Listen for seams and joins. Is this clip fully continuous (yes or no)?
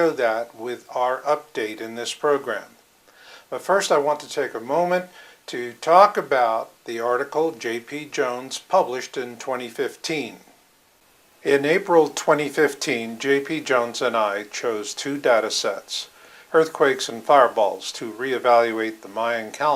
yes